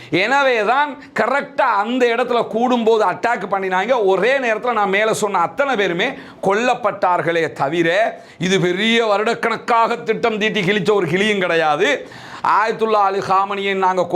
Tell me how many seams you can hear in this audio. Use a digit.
1